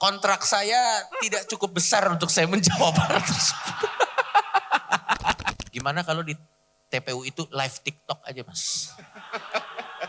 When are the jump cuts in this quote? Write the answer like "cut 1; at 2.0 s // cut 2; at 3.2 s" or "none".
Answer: cut 1; at 5.6 s